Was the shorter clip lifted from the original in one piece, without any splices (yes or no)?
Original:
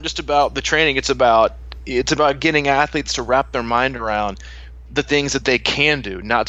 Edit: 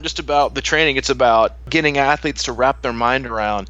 no